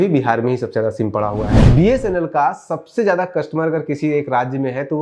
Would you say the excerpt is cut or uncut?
cut